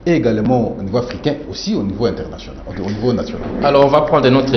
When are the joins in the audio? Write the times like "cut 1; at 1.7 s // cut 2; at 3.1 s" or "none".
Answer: none

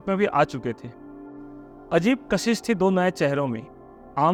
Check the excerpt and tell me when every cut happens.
none

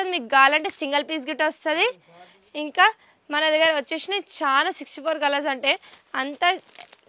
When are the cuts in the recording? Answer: none

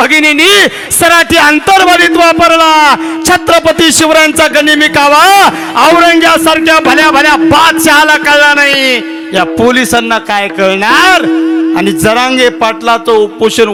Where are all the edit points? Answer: none

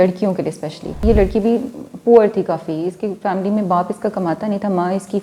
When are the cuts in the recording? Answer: cut 1; at 1.0 s

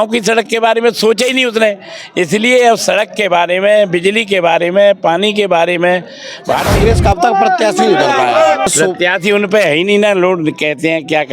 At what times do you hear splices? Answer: cut 1; at 6.7 s // cut 2; at 8.7 s

